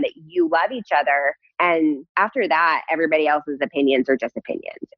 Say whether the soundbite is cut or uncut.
cut